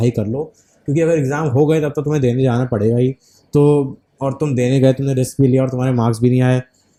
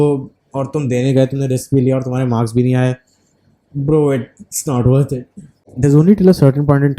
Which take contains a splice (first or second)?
second